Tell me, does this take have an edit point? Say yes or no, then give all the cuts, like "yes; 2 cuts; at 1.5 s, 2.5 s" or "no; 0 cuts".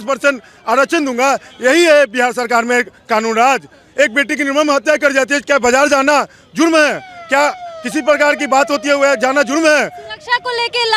no; 0 cuts